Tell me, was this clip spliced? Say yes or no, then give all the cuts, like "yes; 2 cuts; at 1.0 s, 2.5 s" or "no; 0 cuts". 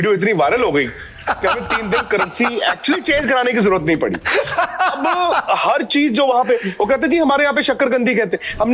no; 0 cuts